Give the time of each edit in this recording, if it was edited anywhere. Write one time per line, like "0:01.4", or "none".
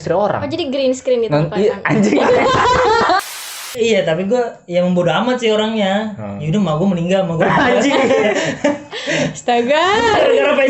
0:03.2